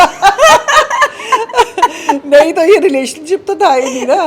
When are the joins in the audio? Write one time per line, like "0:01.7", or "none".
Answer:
none